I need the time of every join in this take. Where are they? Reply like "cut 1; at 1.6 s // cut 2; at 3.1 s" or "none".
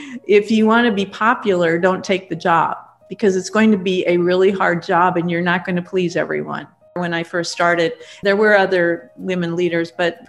cut 1; at 7.0 s // cut 2; at 8.1 s